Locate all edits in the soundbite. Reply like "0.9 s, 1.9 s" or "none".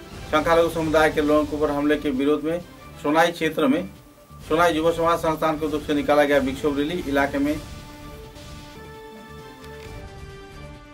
none

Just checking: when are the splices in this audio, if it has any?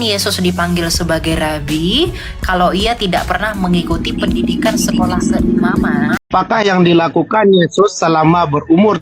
6.2 s

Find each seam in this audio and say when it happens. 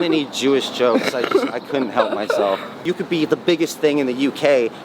2.8 s

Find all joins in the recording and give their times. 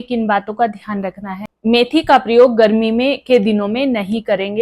1.5 s

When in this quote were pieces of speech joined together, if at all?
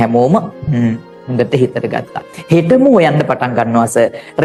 none

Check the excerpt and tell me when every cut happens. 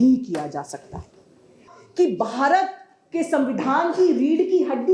1.6 s

